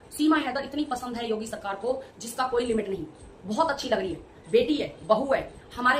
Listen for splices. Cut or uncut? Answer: uncut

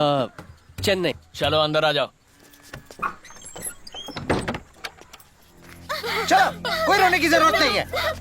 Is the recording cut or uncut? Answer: cut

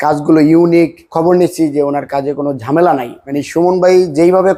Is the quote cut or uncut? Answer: cut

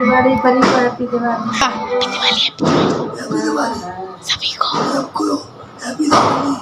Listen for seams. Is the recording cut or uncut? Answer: uncut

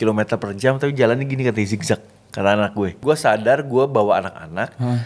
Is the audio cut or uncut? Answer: cut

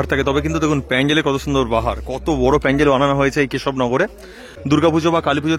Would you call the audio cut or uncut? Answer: uncut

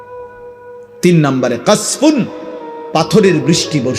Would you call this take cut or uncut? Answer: cut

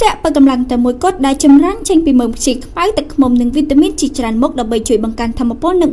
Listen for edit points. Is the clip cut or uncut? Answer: uncut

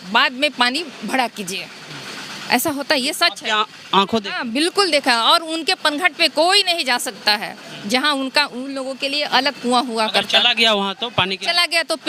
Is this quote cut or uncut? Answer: uncut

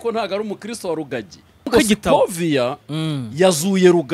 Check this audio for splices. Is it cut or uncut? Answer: cut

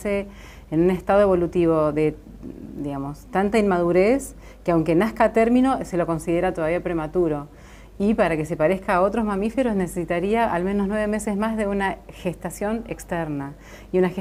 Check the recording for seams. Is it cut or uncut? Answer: uncut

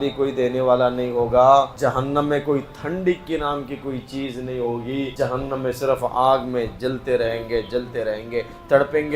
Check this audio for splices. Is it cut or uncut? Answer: cut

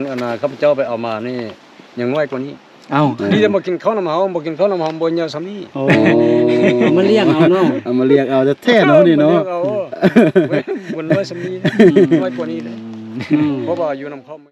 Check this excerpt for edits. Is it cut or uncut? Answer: uncut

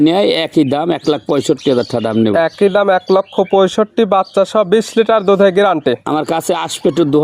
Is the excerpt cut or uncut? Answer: uncut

